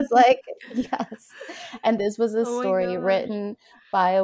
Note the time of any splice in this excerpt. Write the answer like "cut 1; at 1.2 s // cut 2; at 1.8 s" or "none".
none